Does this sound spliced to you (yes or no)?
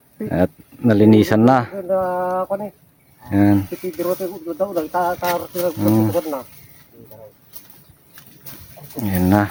no